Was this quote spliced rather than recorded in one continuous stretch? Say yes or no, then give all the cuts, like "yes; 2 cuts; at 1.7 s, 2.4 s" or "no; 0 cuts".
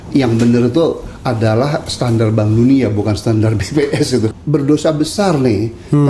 yes; 1 cut; at 4.3 s